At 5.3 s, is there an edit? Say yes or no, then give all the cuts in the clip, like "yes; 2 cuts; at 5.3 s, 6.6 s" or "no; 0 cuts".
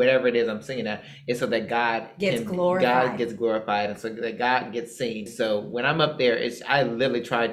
yes; 1 cut; at 5.3 s